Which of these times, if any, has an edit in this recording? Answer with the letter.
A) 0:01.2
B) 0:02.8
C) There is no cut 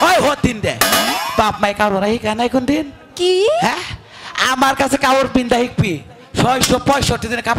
C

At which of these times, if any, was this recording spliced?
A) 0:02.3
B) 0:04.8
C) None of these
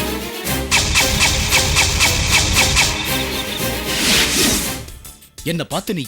B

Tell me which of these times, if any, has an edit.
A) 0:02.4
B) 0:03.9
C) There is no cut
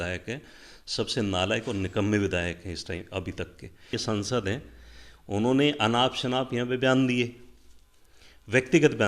B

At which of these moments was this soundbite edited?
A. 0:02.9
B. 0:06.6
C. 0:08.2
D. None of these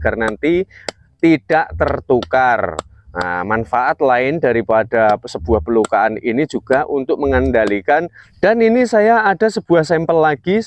C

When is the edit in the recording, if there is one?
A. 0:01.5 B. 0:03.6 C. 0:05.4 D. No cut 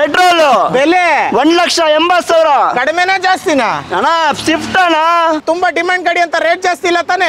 C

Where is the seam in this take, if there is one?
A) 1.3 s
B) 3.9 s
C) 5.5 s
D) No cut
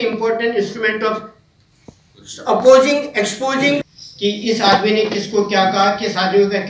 B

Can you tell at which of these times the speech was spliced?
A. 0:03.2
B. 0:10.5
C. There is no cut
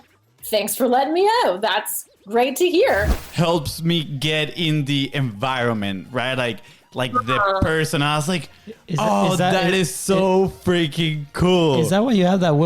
A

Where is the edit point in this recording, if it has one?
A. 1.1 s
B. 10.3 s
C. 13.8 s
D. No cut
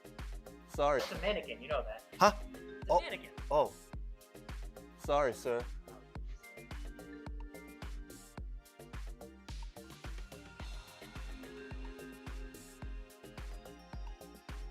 A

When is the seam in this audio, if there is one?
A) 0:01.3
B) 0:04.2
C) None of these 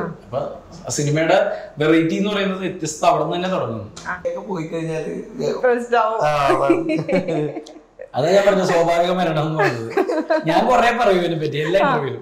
B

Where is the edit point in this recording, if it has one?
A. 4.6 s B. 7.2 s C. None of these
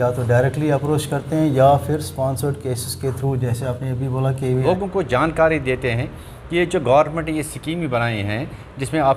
A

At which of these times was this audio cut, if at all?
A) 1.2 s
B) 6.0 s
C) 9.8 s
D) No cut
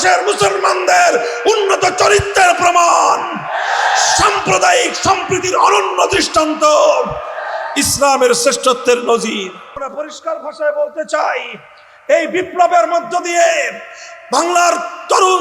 C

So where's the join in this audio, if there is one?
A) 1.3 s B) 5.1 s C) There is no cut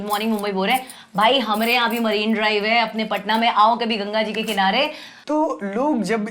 B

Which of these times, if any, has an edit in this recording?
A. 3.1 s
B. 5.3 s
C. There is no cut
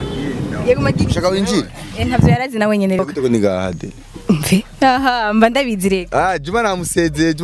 A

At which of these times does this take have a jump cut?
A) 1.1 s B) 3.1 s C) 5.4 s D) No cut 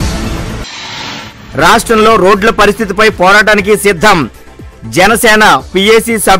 A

